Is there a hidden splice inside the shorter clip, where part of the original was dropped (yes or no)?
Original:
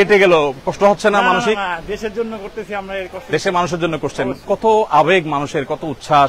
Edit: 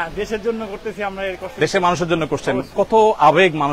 no